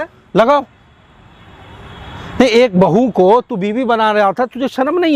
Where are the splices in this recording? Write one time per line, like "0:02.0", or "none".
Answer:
none

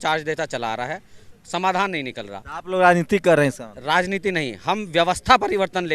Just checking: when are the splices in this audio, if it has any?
none

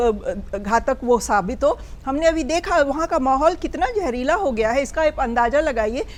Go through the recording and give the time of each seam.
none

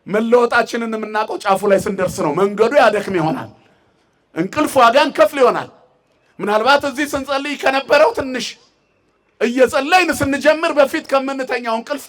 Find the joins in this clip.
none

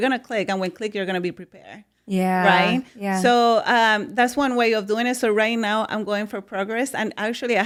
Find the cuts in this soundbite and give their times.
none

